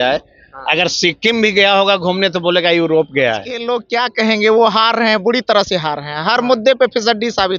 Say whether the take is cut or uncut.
cut